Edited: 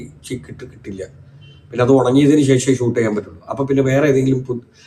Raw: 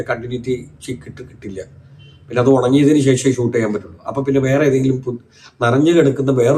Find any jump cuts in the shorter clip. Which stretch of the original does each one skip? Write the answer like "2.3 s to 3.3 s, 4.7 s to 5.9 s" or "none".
none